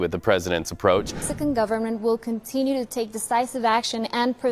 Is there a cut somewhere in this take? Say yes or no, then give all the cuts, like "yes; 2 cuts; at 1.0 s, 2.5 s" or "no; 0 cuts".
yes; 1 cut; at 1.2 s